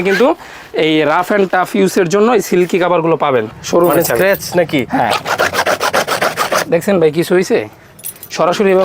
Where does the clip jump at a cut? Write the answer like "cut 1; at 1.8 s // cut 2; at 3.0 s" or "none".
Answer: cut 1; at 3.5 s